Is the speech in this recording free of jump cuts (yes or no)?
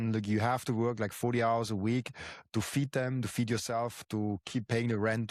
yes